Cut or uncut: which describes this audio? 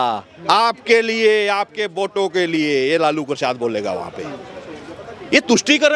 uncut